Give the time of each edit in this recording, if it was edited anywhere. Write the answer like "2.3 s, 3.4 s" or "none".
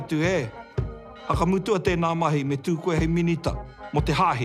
none